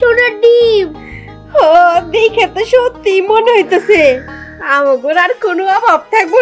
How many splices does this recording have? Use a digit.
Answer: 0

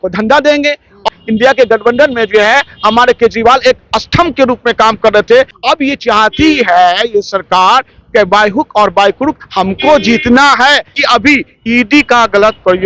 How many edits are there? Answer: 3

